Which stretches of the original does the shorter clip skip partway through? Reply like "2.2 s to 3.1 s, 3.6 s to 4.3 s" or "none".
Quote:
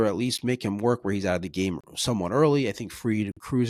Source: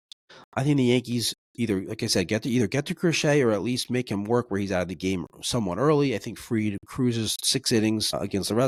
none